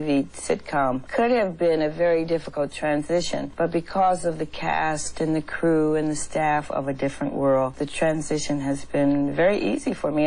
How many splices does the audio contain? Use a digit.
3